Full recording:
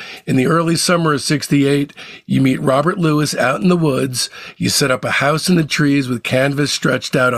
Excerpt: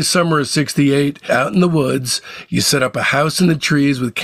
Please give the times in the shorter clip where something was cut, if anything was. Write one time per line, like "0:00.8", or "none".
0:01.2

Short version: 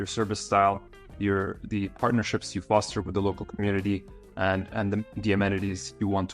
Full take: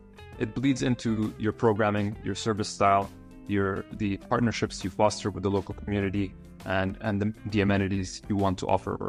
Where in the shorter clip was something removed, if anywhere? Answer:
none

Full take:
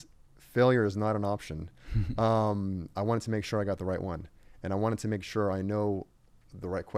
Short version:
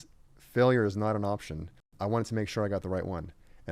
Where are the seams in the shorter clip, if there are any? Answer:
0:01.9

